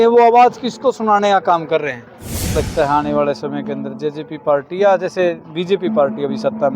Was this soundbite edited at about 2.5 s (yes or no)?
yes